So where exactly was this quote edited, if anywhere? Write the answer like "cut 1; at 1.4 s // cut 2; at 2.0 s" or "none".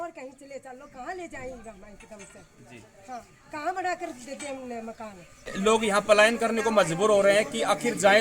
cut 1; at 5.5 s